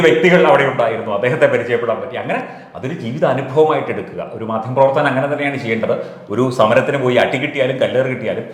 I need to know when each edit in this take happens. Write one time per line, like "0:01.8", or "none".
none